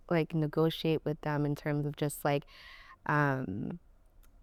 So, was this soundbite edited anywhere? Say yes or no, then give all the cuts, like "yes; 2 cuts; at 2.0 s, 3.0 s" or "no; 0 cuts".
no; 0 cuts